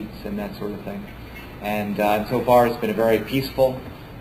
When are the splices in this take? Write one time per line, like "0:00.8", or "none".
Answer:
none